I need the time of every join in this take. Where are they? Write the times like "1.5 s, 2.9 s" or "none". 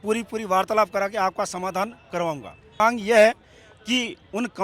2.8 s